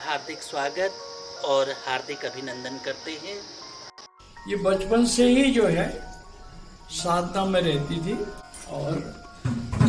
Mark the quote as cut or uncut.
cut